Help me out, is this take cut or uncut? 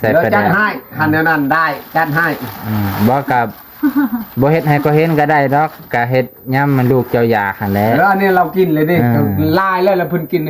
uncut